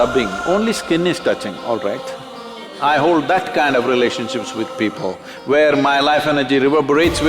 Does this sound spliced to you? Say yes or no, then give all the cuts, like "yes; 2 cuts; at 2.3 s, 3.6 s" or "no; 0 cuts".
yes; 1 cut; at 2.7 s